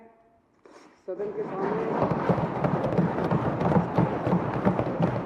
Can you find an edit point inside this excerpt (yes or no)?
no